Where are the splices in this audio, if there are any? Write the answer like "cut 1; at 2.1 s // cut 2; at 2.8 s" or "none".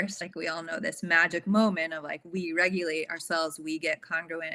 none